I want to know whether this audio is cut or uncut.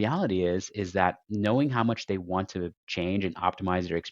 uncut